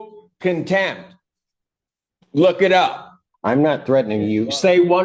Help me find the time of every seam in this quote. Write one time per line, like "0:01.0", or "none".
0:03.1